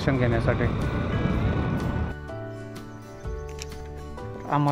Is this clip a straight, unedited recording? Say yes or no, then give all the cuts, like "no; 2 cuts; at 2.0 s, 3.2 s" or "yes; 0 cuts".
yes; 0 cuts